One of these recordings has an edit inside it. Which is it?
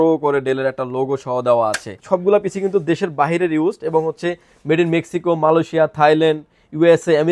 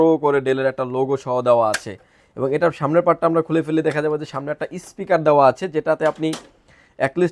first; 1 cut; at 2.0 s

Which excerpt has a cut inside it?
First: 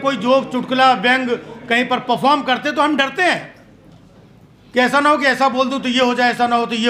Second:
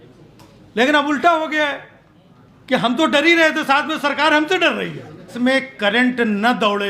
second; 1 cut; at 5.3 s

